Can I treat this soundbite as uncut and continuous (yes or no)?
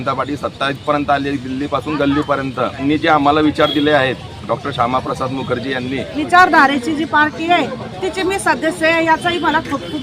no